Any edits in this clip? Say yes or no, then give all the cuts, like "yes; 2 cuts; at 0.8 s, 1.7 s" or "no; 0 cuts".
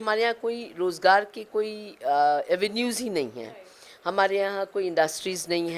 no; 0 cuts